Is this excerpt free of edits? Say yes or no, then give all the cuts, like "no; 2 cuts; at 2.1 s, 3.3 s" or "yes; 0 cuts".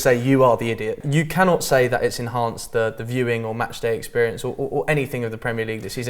no; 1 cut; at 0.9 s